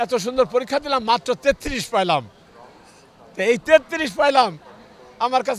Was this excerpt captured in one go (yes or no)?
yes